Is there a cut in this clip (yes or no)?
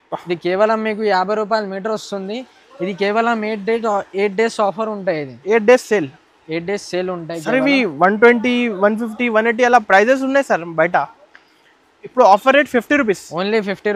no